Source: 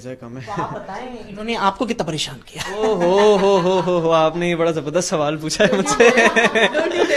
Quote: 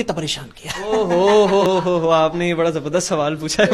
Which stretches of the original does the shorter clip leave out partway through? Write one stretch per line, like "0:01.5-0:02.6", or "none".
0:03.5-0:03.6